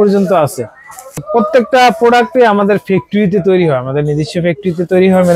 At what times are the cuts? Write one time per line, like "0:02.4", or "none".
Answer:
0:01.2

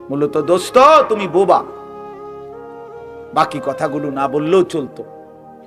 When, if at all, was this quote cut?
0:01.9
0:03.3

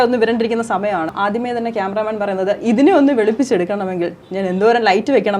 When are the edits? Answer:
0:01.1

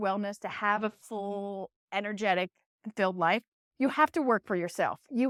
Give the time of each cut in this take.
none

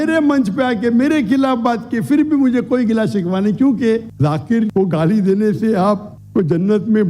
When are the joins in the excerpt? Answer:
0:04.1

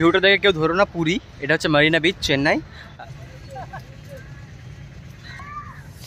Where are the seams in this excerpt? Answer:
0:02.9

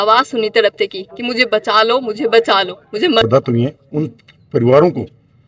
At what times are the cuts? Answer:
0:03.2

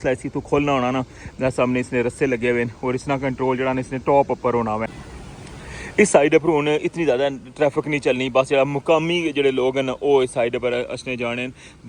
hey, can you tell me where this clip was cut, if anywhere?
0:05.3

